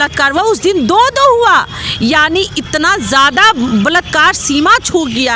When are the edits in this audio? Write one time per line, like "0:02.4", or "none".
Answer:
none